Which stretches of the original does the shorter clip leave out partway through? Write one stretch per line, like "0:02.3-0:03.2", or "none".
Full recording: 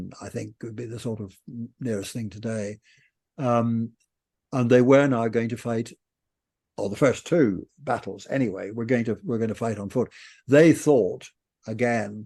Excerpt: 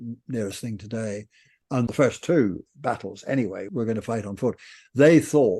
0:03.4-0:06.9
0:08.7-0:09.2